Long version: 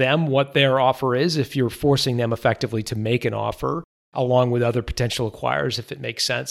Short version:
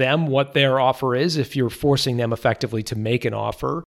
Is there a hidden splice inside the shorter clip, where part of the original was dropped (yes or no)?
no